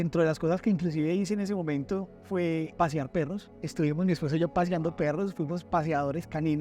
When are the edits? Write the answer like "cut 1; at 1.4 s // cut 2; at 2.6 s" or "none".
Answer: cut 1; at 2.7 s // cut 2; at 3.5 s